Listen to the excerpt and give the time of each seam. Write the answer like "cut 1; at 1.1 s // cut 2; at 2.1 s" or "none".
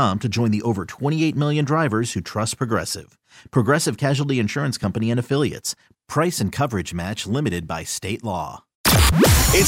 cut 1; at 8.7 s